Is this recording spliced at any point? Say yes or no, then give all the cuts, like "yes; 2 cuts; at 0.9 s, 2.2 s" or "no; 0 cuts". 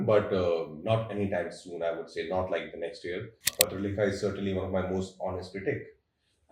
yes; 1 cut; at 3.5 s